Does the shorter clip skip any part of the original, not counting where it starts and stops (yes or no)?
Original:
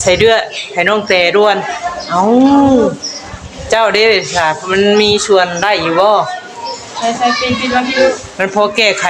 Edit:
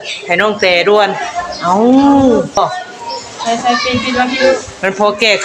yes